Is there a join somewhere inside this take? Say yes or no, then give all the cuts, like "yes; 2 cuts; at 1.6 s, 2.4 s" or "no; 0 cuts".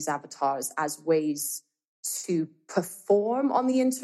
no; 0 cuts